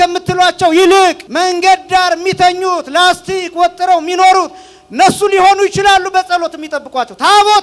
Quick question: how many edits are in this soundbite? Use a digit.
1